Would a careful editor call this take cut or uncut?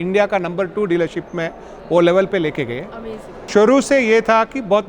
cut